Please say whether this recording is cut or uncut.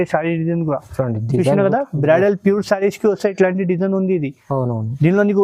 uncut